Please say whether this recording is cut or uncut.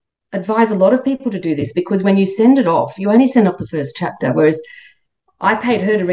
uncut